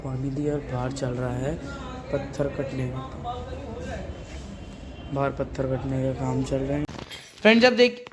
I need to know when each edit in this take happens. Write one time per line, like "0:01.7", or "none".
0:06.8